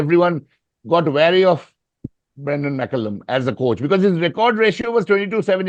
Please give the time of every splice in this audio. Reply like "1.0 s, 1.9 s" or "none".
none

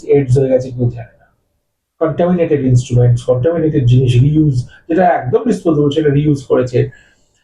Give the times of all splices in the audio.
none

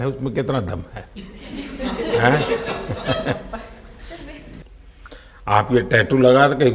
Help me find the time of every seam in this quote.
4.6 s

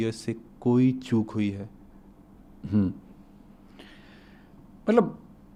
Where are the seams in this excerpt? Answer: none

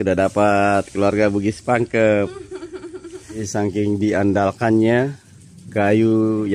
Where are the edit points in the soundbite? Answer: 3.4 s

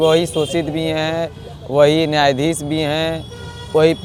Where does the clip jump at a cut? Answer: none

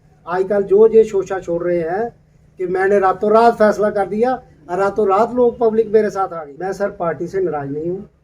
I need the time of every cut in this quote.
6.5 s

